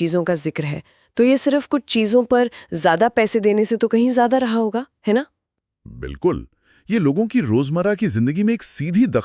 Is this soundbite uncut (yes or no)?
yes